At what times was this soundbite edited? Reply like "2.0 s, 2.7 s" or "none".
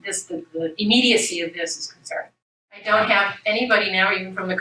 none